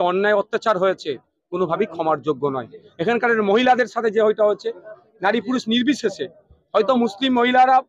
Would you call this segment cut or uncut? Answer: uncut